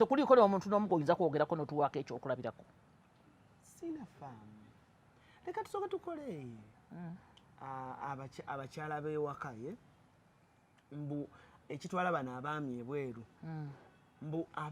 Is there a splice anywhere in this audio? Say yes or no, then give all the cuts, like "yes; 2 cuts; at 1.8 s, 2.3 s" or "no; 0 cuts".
yes; 1 cut; at 6.7 s